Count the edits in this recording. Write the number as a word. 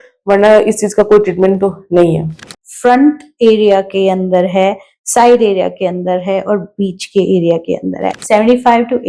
two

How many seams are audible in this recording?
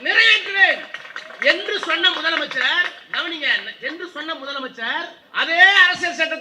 one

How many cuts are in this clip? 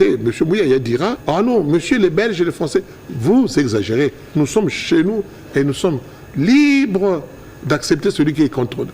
one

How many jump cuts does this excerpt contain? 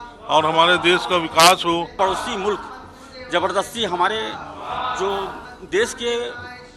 one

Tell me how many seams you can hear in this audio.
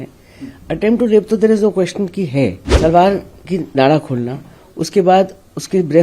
one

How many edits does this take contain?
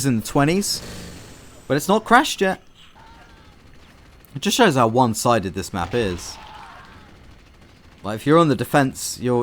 zero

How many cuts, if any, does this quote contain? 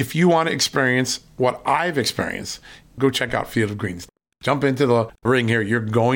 zero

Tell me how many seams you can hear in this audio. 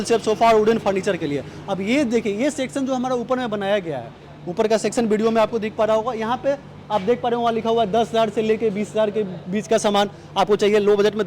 zero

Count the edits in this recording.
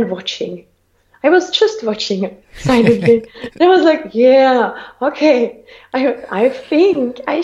zero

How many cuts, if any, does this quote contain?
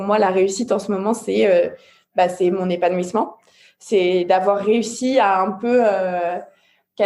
zero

